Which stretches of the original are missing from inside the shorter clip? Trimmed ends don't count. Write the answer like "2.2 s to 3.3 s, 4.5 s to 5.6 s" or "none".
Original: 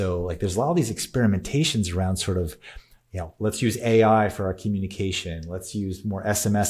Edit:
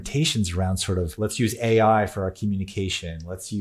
2.5 s to 3.3 s